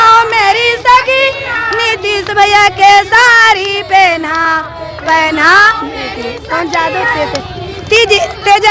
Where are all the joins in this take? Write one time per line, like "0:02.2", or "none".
none